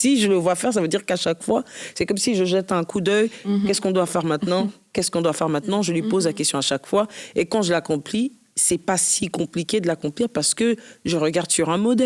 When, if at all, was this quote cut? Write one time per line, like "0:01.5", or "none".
none